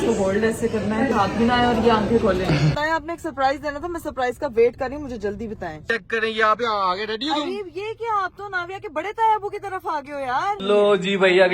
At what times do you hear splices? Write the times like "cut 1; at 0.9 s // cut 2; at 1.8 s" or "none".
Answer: cut 1; at 1.1 s // cut 2; at 2.8 s // cut 3; at 5.8 s // cut 4; at 10.6 s